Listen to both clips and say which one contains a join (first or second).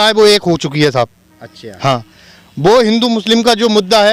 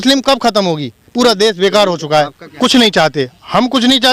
second